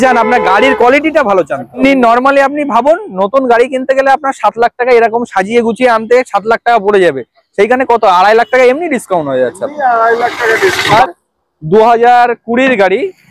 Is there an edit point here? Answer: yes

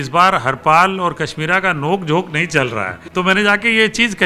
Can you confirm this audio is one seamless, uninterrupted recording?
no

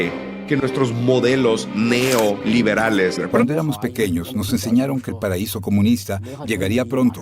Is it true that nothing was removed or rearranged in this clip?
no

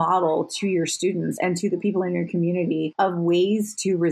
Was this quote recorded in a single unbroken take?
no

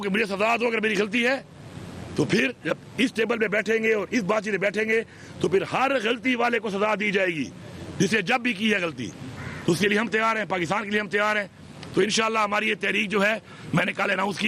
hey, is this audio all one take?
yes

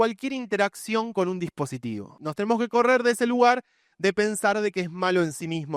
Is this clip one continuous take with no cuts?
no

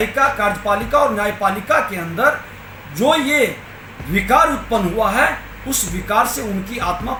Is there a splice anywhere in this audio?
no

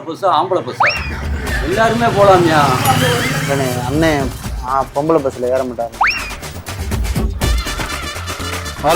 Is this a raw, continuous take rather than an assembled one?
yes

